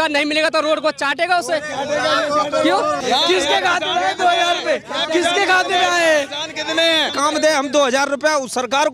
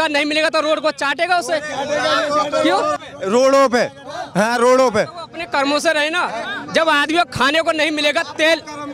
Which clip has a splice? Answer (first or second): first